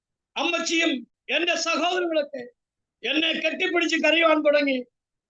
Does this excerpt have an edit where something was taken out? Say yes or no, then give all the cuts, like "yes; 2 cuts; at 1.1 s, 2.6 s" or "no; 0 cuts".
yes; 1 cut; at 1.2 s